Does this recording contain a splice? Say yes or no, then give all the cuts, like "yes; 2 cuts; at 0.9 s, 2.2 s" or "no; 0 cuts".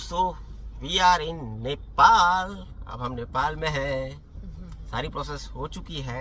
no; 0 cuts